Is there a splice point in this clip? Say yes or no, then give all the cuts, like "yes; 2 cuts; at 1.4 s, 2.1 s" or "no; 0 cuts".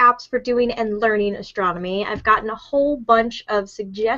no; 0 cuts